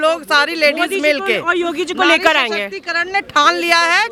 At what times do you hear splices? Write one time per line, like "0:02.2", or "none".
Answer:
none